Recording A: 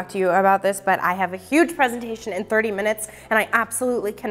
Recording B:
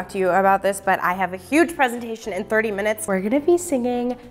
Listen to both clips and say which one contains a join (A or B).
B